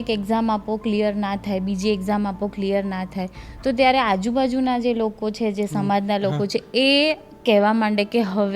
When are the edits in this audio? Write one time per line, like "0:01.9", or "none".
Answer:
none